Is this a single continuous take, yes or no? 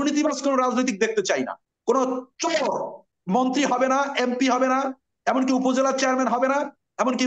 no